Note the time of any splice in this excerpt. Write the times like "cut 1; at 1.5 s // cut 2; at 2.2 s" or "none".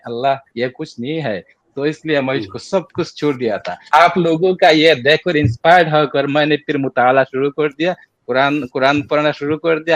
cut 1; at 3.7 s